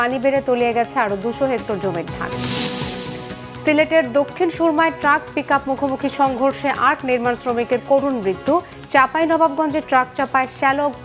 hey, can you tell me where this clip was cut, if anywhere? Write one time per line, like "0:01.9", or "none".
none